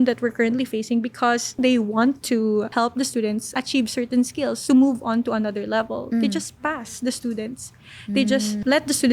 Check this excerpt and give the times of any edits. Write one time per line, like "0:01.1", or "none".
0:01.6
0:04.6

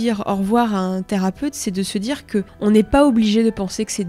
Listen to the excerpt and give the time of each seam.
0:02.5

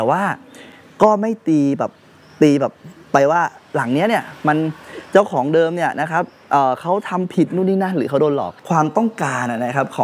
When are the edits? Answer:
0:08.6

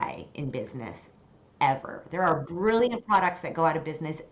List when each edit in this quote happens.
none

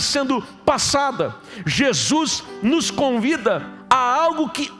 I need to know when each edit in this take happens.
0:03.7

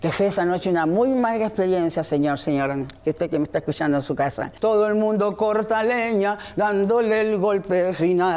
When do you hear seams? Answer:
0:04.5

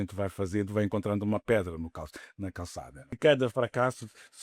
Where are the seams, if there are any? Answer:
0:03.1

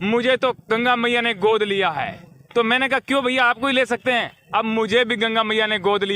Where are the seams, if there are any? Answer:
none

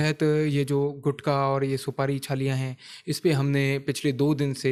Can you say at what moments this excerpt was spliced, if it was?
none

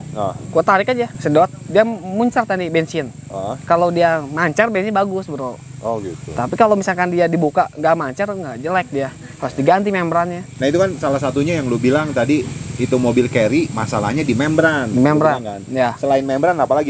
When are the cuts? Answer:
0:01.2
0:10.4

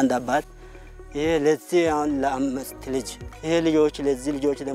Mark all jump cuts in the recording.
0:03.3

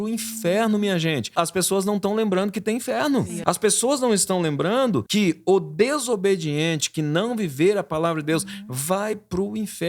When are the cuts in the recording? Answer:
0:01.3
0:03.3
0:05.1

